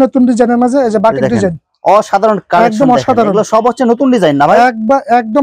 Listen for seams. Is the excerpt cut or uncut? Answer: uncut